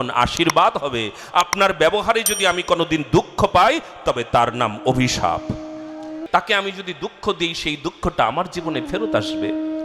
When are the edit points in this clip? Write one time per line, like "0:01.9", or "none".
0:06.2

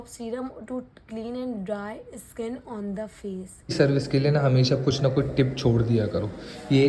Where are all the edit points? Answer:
0:03.7

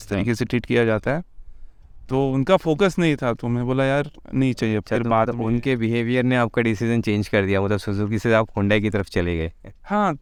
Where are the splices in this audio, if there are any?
none

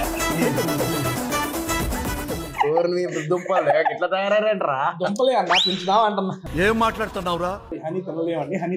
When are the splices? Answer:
0:06.4
0:07.7

